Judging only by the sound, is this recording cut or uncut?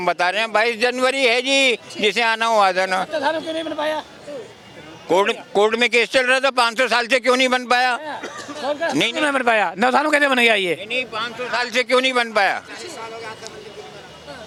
uncut